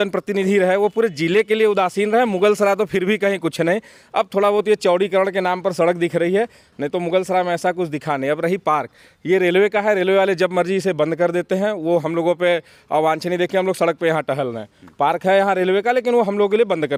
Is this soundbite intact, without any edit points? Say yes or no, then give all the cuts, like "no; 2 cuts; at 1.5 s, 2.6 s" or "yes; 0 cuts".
yes; 0 cuts